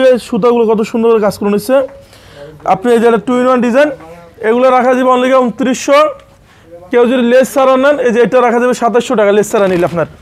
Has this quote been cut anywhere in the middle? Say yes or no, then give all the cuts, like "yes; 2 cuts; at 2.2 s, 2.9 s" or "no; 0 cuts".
no; 0 cuts